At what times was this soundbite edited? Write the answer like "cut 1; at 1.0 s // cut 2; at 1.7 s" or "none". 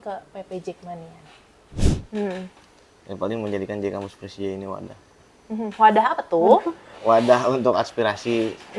cut 1; at 2.0 s